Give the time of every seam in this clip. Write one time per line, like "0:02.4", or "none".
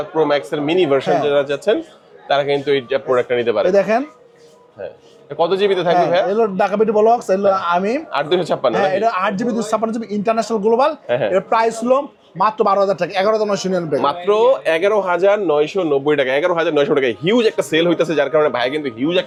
none